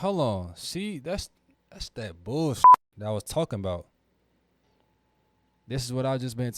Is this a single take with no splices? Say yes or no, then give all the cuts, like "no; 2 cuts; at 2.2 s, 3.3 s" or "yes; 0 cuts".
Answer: no; 1 cut; at 4.6 s